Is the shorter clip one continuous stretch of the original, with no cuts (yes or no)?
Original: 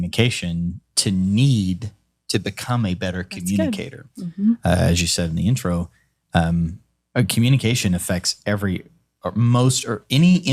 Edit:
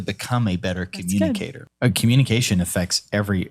no